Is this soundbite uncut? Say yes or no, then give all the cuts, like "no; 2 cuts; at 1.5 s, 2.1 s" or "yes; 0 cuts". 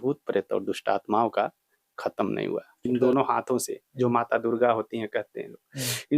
no; 1 cut; at 2.9 s